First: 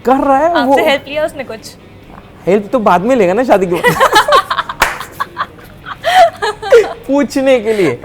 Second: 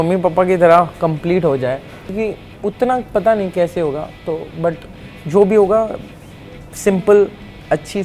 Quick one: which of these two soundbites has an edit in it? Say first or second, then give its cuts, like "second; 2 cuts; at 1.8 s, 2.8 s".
second; 1 cut; at 2.0 s